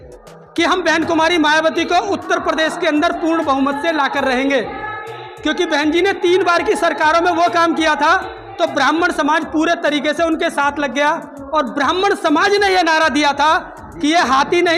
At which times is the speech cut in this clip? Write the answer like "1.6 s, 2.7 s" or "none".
none